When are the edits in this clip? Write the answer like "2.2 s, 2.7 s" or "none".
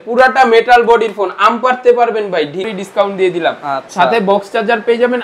2.6 s